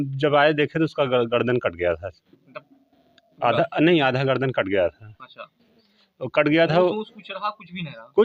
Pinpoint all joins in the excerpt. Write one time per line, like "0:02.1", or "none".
none